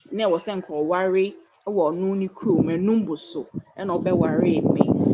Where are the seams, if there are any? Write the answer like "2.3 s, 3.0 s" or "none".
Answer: none